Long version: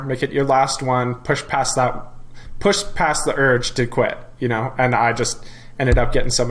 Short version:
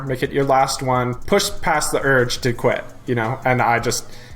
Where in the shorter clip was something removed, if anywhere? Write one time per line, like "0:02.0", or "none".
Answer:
0:01.2